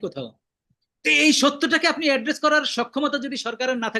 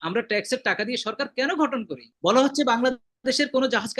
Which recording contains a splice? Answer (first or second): second